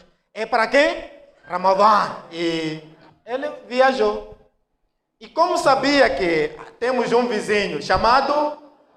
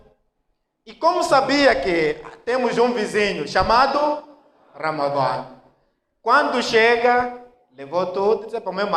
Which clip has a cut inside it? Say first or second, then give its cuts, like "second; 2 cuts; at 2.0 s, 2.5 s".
first; 1 cut; at 2.2 s